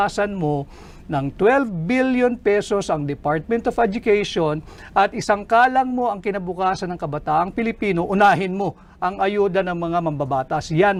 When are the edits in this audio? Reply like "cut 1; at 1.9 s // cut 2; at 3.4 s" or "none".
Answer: none